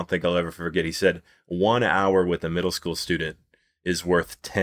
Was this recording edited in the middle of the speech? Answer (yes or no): no